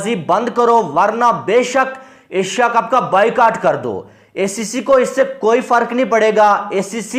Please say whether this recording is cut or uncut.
uncut